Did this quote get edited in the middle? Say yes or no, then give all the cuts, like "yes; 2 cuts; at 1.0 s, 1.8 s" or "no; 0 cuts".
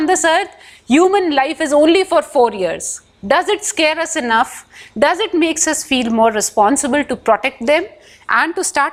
no; 0 cuts